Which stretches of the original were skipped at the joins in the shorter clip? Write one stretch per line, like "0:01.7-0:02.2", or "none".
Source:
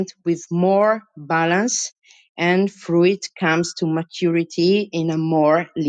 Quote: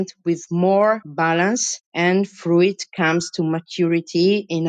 0:01.3-0:01.7